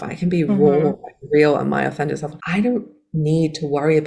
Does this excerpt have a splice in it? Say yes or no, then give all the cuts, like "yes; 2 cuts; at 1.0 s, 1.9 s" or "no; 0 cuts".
yes; 1 cut; at 2.3 s